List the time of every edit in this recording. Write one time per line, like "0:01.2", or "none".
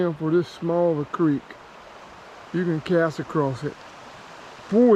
none